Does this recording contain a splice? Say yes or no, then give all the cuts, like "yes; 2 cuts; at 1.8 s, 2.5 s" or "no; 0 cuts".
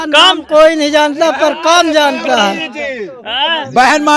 no; 0 cuts